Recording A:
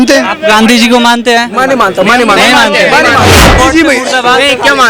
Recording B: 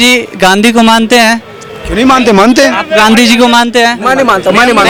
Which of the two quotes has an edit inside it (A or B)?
A